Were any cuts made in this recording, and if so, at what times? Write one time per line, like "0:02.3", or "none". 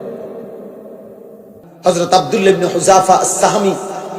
0:01.6

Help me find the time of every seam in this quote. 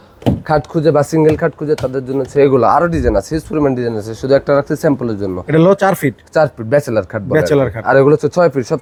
none

